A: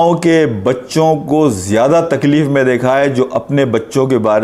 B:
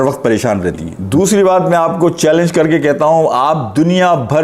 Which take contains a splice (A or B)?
B